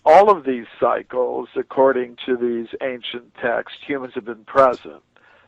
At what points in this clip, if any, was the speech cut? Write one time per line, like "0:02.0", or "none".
0:01.4